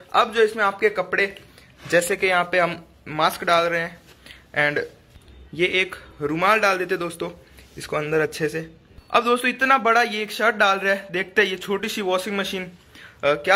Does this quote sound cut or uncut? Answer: uncut